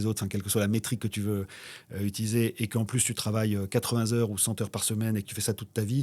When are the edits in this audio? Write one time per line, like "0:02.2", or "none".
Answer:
none